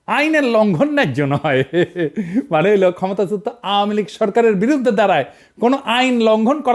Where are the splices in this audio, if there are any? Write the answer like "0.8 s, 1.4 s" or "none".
none